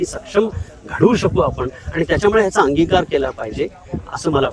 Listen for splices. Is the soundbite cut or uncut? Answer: uncut